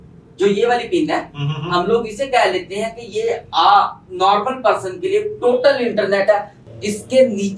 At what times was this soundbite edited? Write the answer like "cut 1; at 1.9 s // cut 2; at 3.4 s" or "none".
cut 1; at 6.6 s